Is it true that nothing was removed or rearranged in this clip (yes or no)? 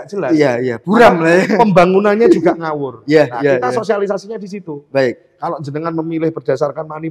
yes